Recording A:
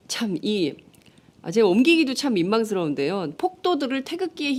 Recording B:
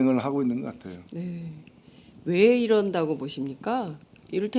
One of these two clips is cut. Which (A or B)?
B